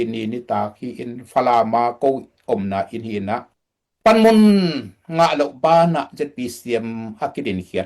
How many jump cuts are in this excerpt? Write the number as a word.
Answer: one